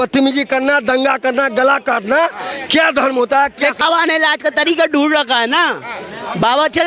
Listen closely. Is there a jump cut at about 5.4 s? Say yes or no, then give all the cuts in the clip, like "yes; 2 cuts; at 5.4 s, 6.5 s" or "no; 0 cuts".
no; 1 cut; at 3.8 s